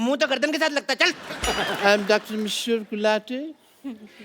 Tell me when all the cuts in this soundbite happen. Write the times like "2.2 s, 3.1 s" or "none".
1.3 s